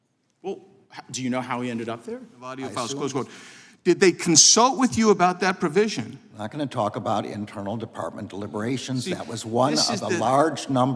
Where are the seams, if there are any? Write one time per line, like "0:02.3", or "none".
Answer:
0:02.6